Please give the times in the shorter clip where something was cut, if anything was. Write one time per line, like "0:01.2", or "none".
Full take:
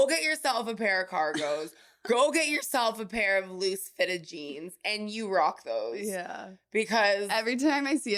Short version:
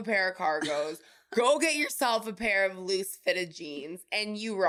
none